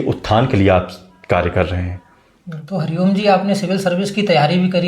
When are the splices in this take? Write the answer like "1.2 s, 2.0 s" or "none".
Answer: 2.6 s

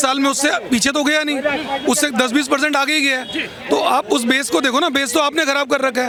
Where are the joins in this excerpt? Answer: none

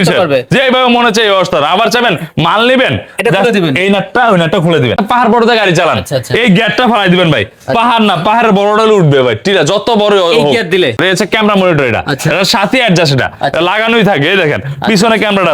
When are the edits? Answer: 5.0 s, 11.0 s

